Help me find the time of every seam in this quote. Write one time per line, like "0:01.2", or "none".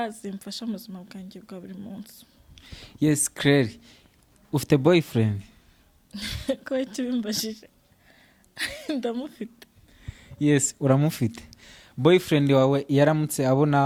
none

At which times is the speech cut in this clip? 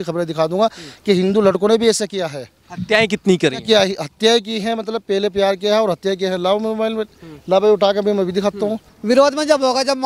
0:08.9

